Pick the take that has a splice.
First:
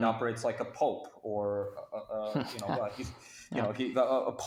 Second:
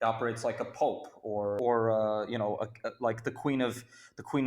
second; 1 cut; at 1.6 s

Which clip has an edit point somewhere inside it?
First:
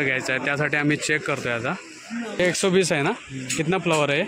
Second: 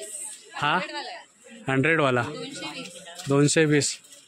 first; 1 cut; at 2.4 s

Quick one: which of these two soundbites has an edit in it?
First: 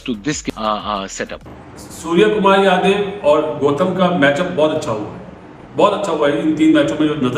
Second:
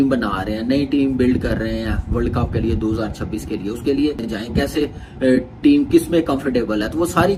first; 1 cut; at 1.5 s

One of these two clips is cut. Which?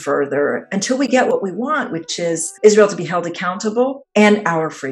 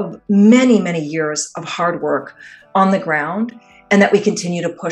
first; 2 cuts; at 1.3 s, 4.0 s

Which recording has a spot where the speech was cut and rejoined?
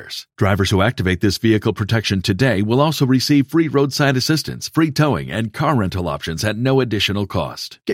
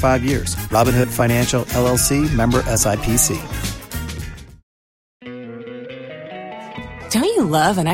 second; 1 cut; at 5.3 s

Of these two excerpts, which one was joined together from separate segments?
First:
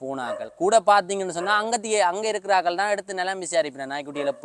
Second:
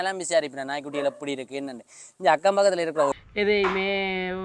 second; 1 cut; at 3.1 s

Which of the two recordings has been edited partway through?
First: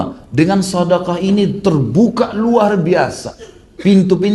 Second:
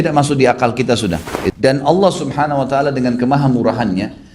second; 1 cut; at 1.4 s

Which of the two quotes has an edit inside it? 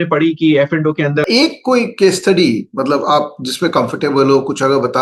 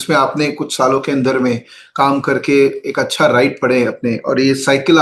first; 1 cut; at 1.2 s

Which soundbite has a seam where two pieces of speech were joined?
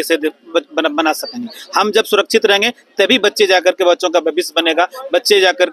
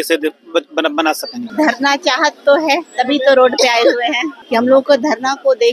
second; 2 cuts; at 1.4 s, 4.3 s

